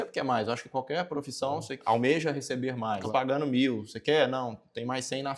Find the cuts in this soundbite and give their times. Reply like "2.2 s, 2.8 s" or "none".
3.0 s